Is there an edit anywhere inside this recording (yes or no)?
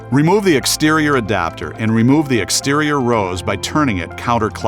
yes